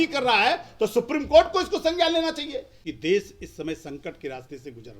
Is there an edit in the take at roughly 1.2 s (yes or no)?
no